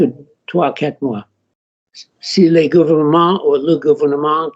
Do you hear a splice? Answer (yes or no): yes